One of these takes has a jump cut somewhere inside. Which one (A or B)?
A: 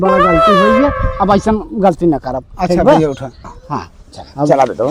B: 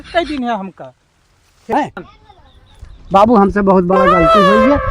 B